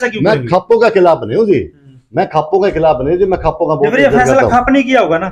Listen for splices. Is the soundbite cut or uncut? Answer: uncut